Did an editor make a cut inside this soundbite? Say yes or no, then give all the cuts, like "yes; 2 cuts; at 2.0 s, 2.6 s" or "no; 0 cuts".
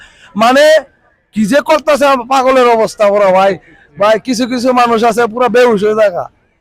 no; 0 cuts